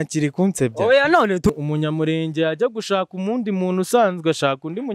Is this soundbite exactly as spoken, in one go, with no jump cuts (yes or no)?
no